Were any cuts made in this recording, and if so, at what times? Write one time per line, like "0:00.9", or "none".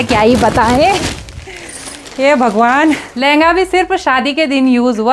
none